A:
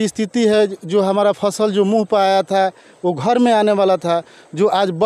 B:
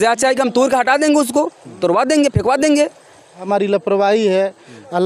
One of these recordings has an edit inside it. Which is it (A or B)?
B